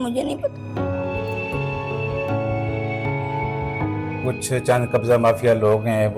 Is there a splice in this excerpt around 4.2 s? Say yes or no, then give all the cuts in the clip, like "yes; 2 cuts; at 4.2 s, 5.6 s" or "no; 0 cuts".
yes; 1 cut; at 4.2 s